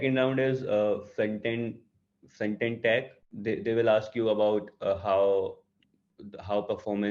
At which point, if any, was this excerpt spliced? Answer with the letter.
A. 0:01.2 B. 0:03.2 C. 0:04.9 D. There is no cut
B